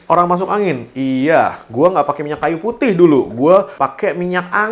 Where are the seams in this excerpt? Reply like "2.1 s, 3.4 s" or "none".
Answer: 3.7 s